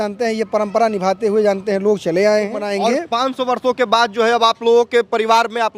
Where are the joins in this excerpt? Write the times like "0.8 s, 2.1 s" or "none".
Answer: 2.6 s